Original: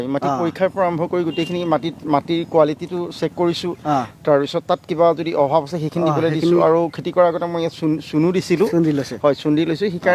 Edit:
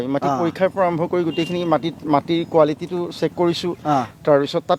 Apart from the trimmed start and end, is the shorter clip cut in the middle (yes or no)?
no